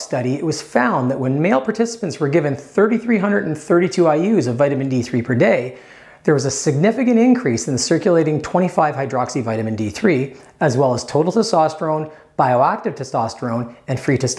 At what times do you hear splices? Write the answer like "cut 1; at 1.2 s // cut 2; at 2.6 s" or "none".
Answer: none